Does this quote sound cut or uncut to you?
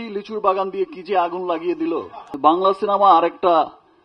cut